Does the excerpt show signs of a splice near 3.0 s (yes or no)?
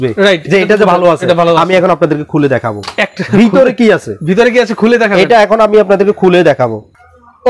no